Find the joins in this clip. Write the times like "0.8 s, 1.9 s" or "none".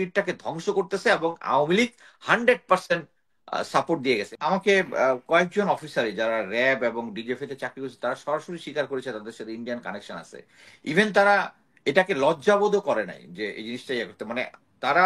4.3 s